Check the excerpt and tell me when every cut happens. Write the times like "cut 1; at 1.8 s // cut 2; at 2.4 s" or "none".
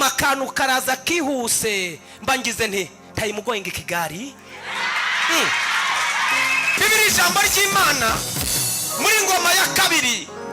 cut 1; at 6.8 s